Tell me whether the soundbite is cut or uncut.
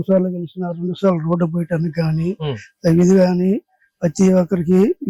uncut